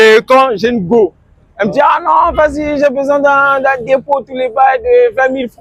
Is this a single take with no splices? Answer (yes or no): yes